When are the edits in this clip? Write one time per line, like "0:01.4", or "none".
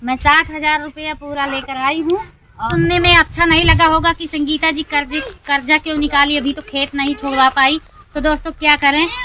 0:02.7